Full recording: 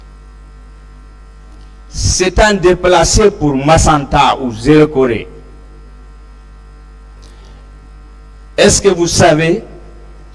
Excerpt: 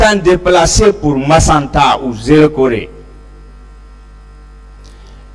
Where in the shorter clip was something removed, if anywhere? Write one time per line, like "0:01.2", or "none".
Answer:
none